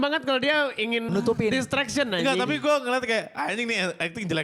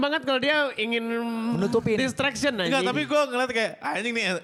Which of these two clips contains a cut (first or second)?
first